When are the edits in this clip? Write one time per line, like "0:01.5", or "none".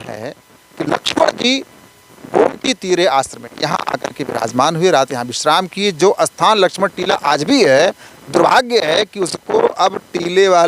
none

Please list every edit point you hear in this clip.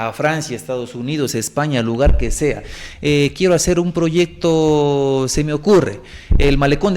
0:02.8

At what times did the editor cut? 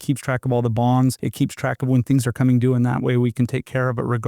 0:01.2

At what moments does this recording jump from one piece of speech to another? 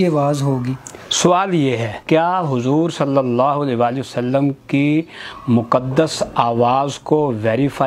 0:02.0

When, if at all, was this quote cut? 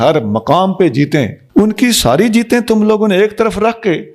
0:01.4

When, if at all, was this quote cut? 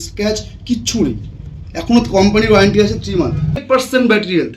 0:03.6

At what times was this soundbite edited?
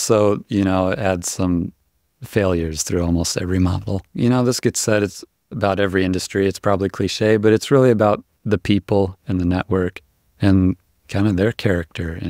0:04.0

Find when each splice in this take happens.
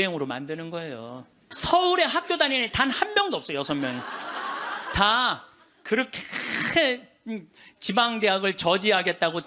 0:01.4

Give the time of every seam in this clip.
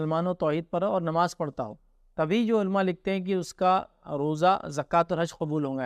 none

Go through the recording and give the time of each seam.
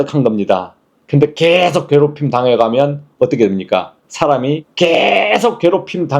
0:04.3

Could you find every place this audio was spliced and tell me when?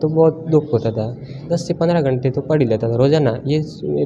0:01.4

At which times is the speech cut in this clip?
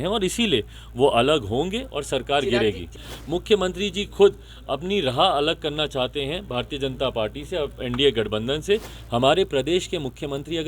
0:03.0
0:09.0

